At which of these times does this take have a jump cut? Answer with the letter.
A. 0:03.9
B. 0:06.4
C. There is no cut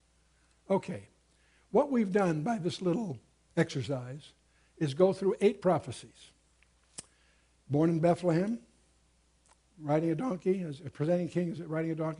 A